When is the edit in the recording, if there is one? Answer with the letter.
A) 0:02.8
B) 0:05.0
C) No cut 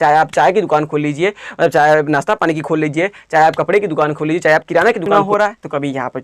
B